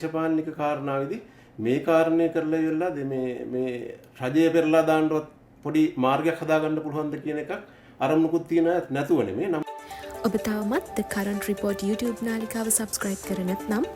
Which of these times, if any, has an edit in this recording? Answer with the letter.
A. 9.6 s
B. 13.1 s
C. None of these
A